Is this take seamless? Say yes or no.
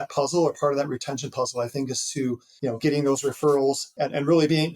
no